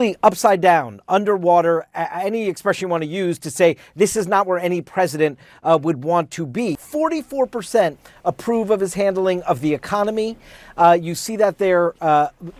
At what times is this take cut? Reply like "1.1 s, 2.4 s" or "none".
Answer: 6.8 s

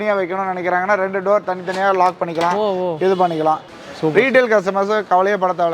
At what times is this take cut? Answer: 3.8 s

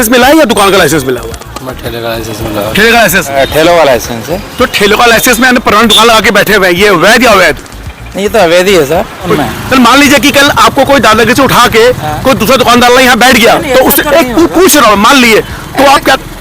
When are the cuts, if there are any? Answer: 3.3 s, 9.3 s

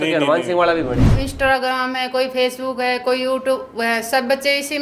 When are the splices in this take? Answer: 1.1 s

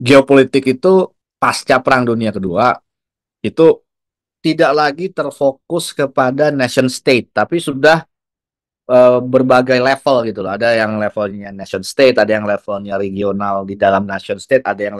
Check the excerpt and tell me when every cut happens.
1.2 s, 4.3 s

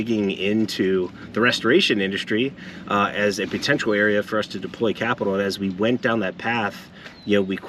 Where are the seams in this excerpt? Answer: none

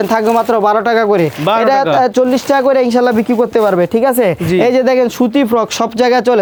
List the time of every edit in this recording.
none

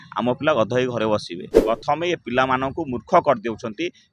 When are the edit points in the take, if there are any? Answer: 1.5 s

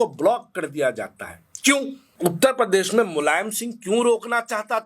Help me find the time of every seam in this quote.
2.1 s

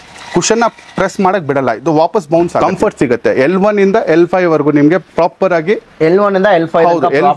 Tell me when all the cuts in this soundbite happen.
2.6 s

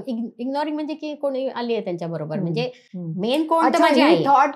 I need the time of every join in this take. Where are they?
none

